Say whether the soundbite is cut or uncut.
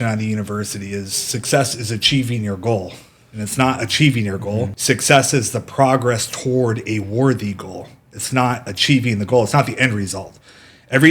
cut